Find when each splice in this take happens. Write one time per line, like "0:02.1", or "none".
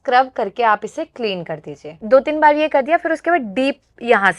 0:02.0